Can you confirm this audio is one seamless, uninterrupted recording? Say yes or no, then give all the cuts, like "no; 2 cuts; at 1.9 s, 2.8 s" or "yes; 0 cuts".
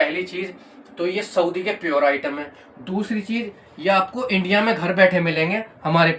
yes; 0 cuts